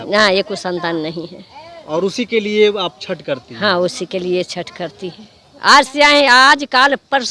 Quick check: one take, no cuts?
yes; 0 cuts

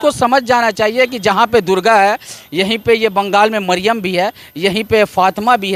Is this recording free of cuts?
yes; 0 cuts

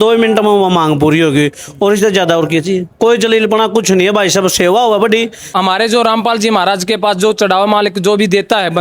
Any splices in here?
yes; 1 cut; at 5.4 s

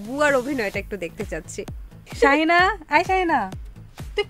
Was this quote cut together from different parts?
yes; 1 cut; at 2.0 s

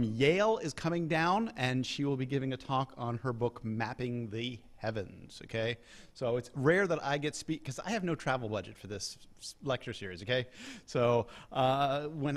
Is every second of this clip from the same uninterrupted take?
yes; 0 cuts

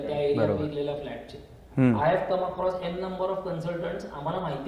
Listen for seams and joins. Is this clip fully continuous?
yes; 0 cuts

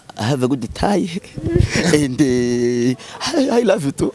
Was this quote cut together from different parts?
no; 0 cuts

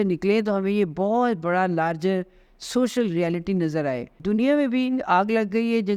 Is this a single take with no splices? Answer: no; 1 cut; at 4.2 s

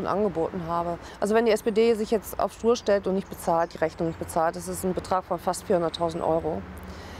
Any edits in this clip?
yes; 1 cut; at 1.1 s

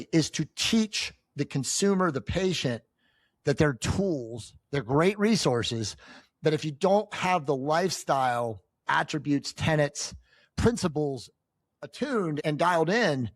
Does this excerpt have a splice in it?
yes; 2 cuts; at 8.8 s, 12.4 s

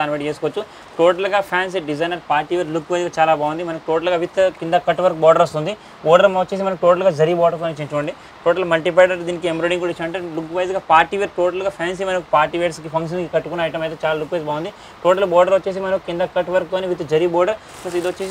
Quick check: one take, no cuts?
yes; 0 cuts

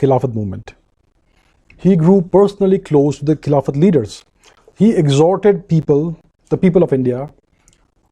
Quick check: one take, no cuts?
yes; 0 cuts

